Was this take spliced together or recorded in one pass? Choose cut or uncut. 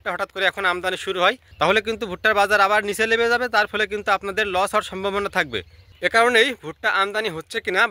uncut